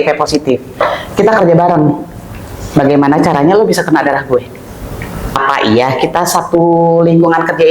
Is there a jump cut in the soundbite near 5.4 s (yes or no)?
yes